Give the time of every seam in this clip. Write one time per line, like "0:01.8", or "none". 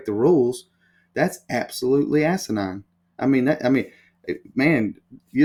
none